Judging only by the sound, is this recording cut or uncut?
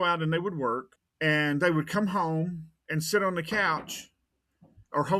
cut